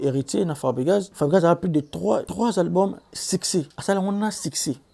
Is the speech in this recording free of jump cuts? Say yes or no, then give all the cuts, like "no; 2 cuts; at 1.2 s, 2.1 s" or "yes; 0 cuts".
no; 3 cuts; at 1.1 s, 2.3 s, 3.7 s